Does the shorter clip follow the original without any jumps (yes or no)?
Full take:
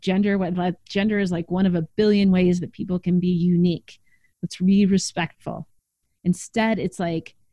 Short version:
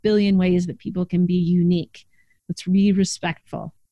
yes